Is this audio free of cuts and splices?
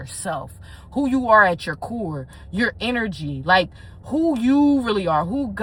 yes; 0 cuts

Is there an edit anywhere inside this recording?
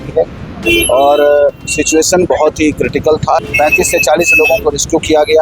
yes; 1 cut; at 3.4 s

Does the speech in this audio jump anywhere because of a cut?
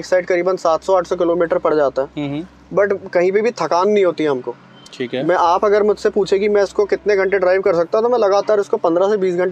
no; 0 cuts

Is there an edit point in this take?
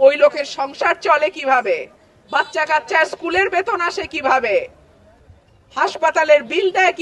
no; 0 cuts

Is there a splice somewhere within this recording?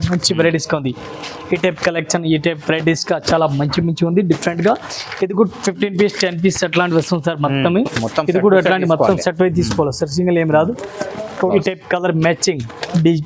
yes; 1 cut; at 11.5 s

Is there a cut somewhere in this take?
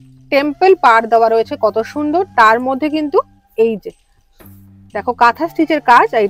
no; 0 cuts

